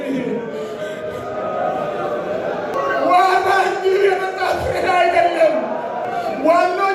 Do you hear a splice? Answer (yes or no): yes